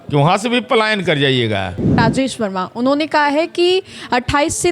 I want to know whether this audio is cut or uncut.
cut